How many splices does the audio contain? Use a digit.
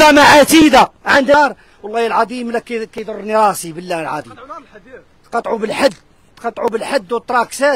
1